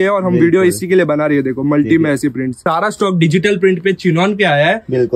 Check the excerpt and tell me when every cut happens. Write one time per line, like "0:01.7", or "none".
0:02.6

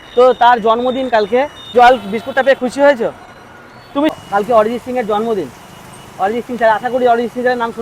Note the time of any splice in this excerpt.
0:01.6
0:04.1

